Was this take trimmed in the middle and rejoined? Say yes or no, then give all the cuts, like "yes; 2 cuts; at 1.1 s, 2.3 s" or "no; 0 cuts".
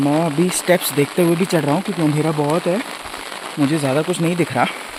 no; 0 cuts